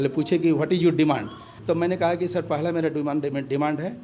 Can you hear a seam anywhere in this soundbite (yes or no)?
yes